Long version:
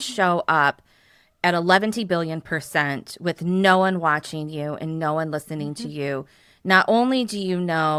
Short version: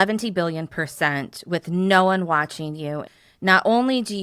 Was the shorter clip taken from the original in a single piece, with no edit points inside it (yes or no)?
no